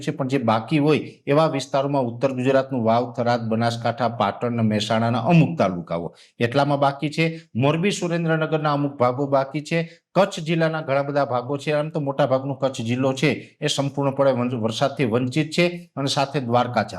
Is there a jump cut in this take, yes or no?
no